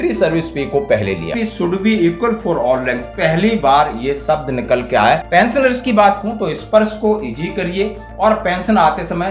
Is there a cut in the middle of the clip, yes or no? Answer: yes